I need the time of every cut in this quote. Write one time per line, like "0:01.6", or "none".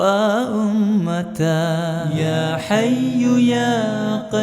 0:02.1